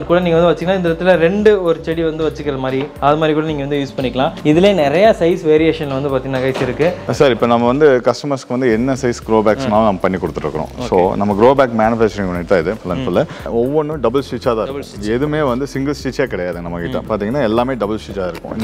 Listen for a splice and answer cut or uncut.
cut